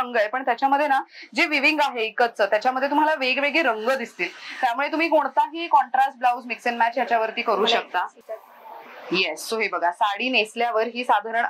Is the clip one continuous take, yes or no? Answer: yes